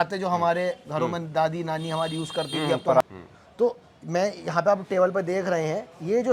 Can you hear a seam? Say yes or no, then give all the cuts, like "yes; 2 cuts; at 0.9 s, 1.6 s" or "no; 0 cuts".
yes; 1 cut; at 3.0 s